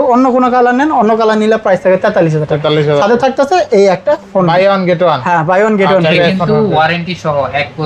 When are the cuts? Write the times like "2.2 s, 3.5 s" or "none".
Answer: none